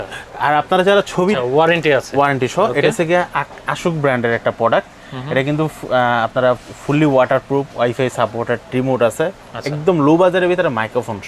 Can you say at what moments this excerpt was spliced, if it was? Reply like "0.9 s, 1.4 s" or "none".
1.4 s